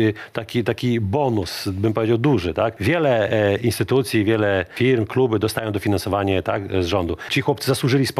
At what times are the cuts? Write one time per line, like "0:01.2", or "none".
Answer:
0:02.8
0:04.7
0:07.3